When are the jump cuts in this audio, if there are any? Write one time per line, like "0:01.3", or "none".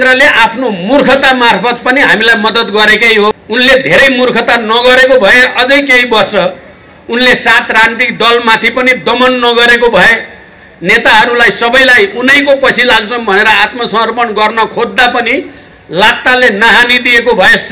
0:03.3